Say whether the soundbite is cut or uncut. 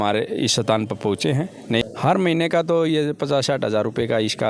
cut